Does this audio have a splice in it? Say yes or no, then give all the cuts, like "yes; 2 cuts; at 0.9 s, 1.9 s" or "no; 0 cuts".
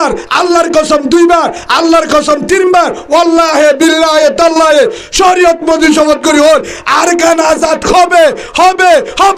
no; 0 cuts